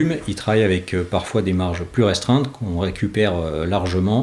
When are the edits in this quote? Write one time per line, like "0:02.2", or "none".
none